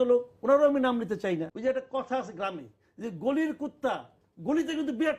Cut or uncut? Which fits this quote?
cut